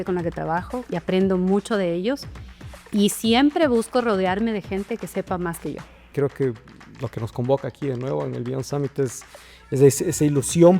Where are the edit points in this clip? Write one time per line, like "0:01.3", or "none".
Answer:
0:06.1